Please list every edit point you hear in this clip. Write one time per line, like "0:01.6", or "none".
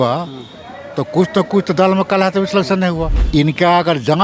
0:03.1